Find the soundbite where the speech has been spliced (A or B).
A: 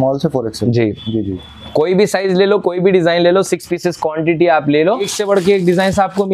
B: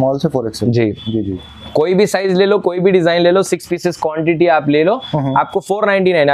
A